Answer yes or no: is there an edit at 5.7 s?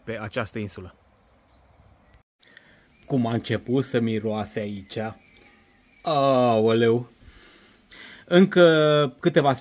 no